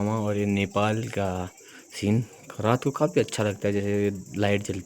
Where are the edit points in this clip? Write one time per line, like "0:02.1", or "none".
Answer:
none